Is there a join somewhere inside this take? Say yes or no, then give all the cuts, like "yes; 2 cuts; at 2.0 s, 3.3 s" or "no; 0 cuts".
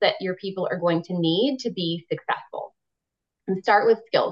no; 0 cuts